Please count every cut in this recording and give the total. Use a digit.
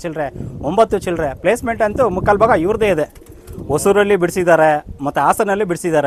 0